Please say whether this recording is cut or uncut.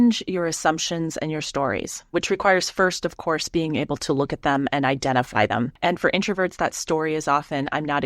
cut